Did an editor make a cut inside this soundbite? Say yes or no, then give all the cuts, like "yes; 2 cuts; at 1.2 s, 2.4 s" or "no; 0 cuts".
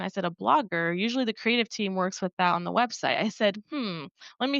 no; 0 cuts